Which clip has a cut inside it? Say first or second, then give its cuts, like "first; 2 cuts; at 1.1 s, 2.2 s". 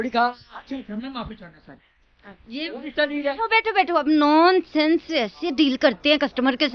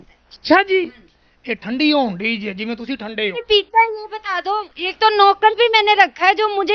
second; 1 cut; at 3.4 s